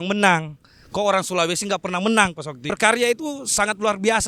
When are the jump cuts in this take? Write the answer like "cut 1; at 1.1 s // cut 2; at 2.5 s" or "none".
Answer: cut 1; at 2.7 s